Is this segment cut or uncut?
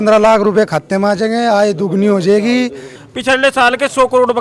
cut